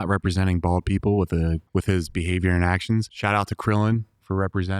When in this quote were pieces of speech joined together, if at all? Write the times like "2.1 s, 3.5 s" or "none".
1.6 s, 3.1 s